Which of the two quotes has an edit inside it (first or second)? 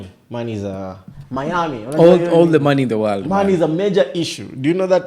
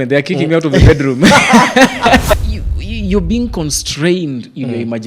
second